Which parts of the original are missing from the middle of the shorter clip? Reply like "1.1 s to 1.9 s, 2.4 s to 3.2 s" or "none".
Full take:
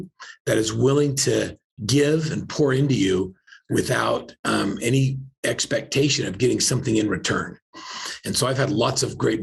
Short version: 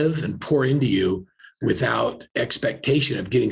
4.3 s to 5.3 s

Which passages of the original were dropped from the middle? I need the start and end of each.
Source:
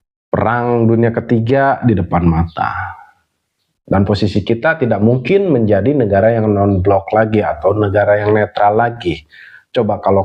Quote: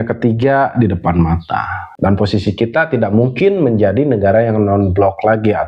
2.9 s to 3.7 s

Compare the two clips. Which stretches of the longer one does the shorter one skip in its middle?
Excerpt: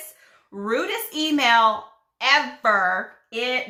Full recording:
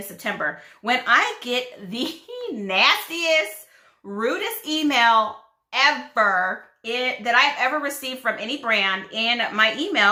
none

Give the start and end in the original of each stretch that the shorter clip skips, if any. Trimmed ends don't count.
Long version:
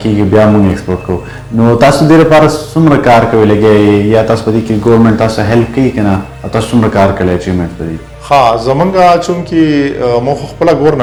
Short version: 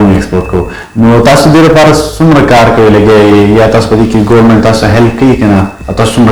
none

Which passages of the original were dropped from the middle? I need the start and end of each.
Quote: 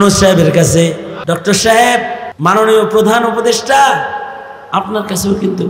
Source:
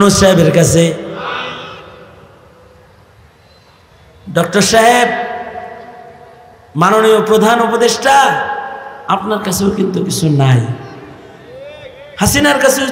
1.1 s to 4.2 s, 5.3 s to 6.6 s

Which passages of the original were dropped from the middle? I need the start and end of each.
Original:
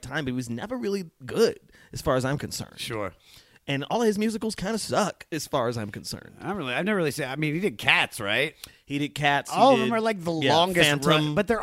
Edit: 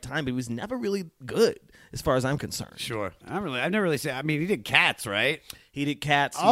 3.2 s to 6.3 s

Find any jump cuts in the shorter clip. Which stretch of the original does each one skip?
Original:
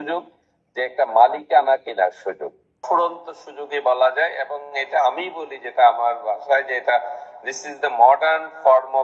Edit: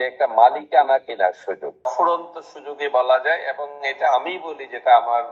2.5 s to 2.7 s

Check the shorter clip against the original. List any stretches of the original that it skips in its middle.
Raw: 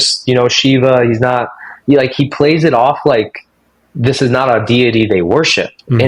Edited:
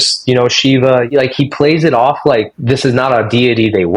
1.1 s to 1.9 s, 3.3 s to 3.9 s

